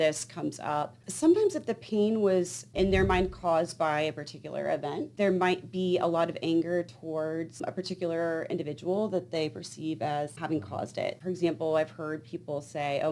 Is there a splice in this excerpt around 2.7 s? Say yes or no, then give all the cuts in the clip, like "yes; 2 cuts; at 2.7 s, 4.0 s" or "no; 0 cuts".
no; 1 cut; at 1.0 s